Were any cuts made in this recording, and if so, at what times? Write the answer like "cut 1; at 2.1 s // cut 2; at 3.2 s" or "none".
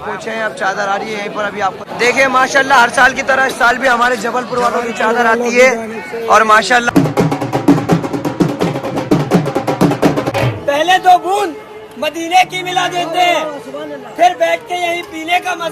cut 1; at 6.8 s